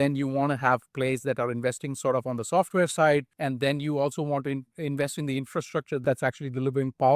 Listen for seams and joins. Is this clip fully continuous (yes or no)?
no